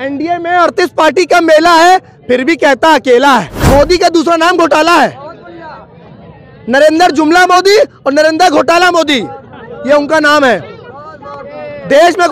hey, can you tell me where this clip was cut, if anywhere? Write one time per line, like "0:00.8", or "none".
0:03.5